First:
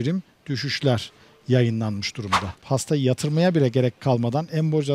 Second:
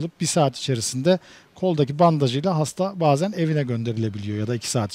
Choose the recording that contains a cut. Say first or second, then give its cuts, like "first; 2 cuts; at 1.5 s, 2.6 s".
first; 1 cut; at 2.6 s